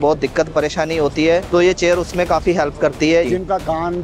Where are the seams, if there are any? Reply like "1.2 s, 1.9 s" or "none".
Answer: 1.4 s, 3.3 s